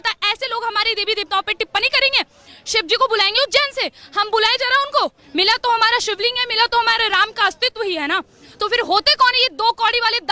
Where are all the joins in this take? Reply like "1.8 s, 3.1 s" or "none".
5.2 s